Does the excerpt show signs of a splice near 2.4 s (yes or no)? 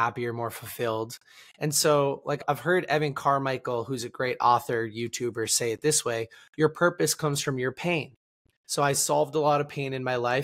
yes